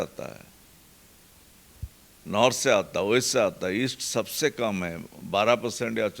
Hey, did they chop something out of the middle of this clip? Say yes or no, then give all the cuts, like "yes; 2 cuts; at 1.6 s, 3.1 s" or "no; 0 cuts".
no; 0 cuts